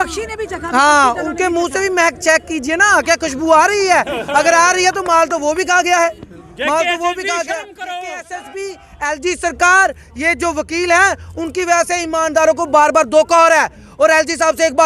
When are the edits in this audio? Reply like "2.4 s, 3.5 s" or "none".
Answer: 8.3 s